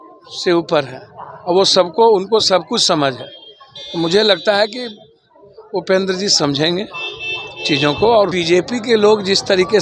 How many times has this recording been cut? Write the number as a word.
one